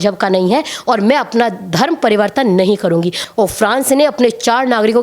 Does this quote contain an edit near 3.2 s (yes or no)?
yes